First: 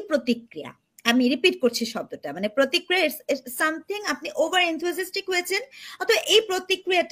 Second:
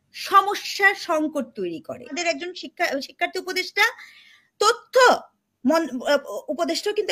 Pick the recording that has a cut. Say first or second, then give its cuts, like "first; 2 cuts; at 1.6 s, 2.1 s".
second; 1 cut; at 2.1 s